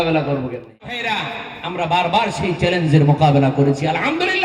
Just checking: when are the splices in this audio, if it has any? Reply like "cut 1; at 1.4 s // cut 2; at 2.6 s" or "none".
cut 1; at 1.0 s

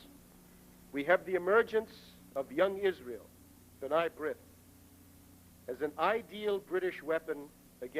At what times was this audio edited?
cut 1; at 2.1 s

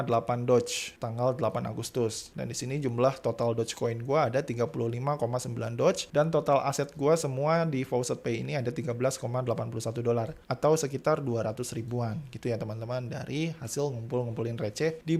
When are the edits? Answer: none

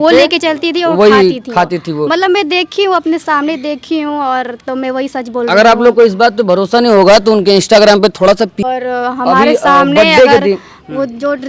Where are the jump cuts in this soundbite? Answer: cut 1; at 8.6 s

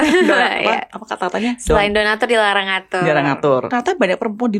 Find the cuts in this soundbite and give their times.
cut 1; at 3.7 s

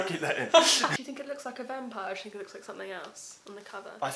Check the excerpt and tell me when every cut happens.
cut 1; at 1.0 s

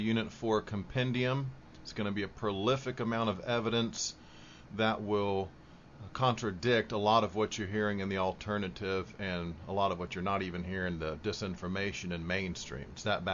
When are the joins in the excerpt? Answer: cut 1; at 9.4 s

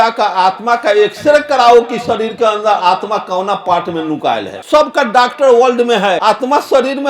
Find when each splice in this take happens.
cut 1; at 4.5 s // cut 2; at 6.2 s

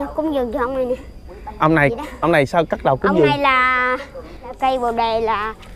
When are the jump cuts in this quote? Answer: cut 1; at 4.5 s

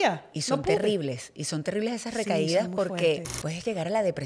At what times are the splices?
cut 1; at 3.4 s

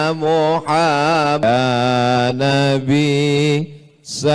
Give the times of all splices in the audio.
cut 1; at 1.4 s

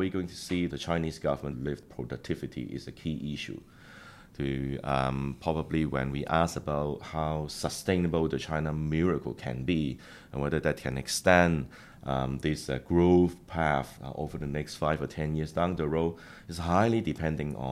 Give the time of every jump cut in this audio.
cut 1; at 0.8 s // cut 2; at 1.7 s

